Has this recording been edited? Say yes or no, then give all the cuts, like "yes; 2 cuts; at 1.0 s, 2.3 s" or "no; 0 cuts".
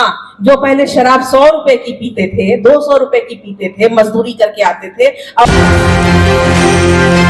yes; 1 cut; at 5.5 s